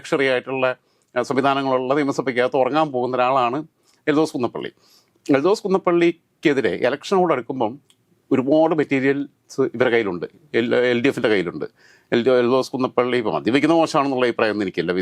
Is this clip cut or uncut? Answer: uncut